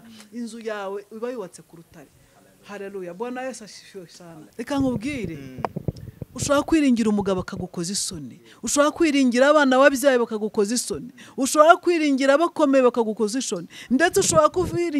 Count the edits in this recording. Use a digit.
1